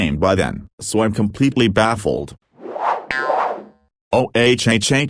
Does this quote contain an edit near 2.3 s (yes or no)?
no